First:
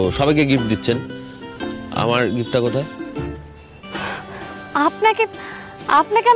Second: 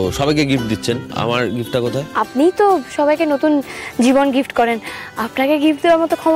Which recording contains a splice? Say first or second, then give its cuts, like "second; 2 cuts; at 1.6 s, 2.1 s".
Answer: second; 2 cuts; at 1.1 s, 2.1 s